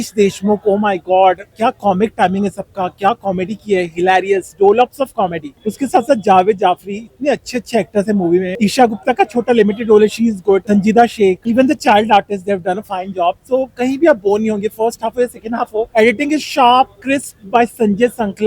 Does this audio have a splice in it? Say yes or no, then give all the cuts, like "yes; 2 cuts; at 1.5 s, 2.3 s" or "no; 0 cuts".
no; 0 cuts